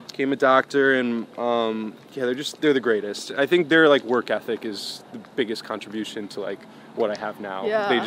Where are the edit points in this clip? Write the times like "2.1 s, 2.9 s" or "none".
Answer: none